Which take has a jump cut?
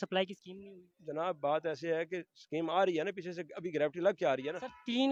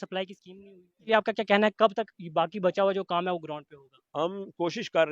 second; 1 cut; at 1.1 s

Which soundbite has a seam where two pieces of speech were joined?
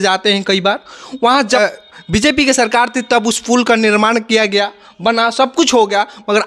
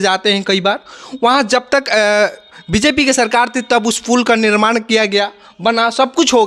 first; 1 cut; at 1.6 s

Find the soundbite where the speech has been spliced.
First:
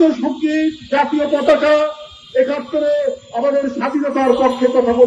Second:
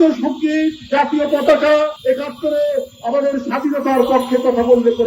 second; 1 cut; at 2.0 s

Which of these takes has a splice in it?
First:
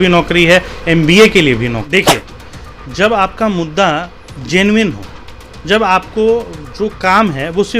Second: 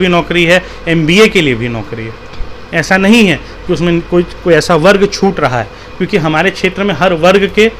first; 1 cut; at 1.9 s

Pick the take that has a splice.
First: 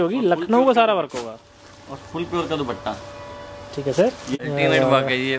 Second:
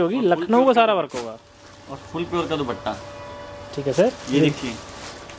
first; 1 cut; at 4.3 s

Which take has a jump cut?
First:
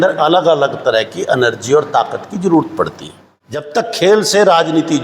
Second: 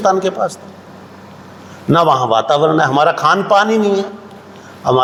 first; 1 cut; at 3.7 s

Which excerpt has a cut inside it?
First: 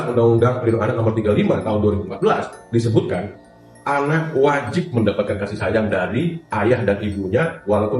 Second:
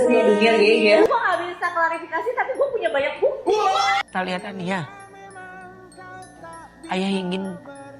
second; 2 cuts; at 1.1 s, 4.0 s

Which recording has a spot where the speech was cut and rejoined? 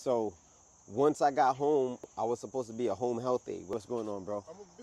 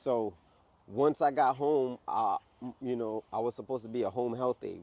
first; 2 cuts; at 2.0 s, 3.7 s

